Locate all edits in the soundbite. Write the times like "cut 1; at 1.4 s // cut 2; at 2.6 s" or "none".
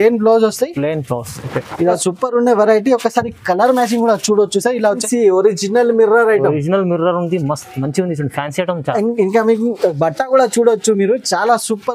cut 1; at 2.0 s // cut 2; at 5.0 s